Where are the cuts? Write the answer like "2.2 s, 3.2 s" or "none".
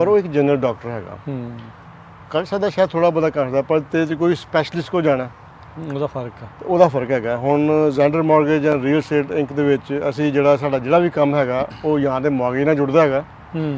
none